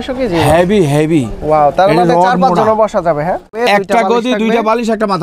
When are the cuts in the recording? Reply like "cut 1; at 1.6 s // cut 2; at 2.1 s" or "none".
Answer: cut 1; at 3.5 s